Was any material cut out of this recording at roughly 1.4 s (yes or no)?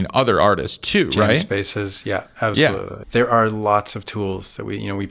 no